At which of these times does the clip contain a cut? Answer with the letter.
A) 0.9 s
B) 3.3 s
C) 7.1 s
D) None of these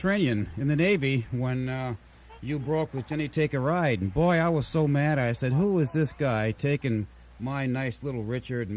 B